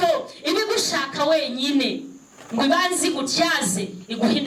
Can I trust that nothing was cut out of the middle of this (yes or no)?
yes